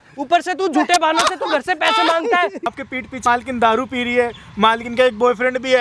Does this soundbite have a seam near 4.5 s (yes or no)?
no